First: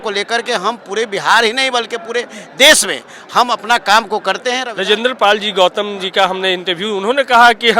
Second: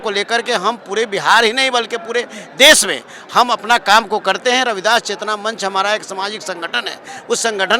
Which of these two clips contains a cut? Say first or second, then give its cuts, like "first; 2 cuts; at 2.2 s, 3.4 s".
first; 1 cut; at 4.7 s